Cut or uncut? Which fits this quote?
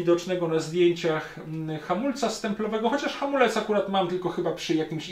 uncut